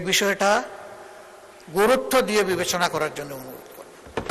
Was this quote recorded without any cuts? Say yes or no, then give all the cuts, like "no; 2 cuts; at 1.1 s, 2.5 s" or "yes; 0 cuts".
yes; 0 cuts